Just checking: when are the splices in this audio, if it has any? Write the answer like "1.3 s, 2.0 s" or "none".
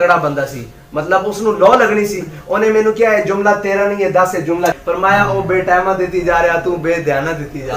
4.8 s